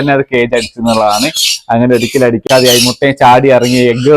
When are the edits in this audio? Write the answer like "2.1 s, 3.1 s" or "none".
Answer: 2.5 s